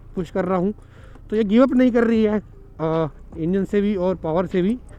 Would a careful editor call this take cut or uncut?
uncut